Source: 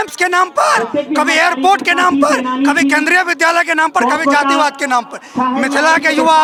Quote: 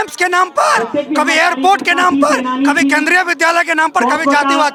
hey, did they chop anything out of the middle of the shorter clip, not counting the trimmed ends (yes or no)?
no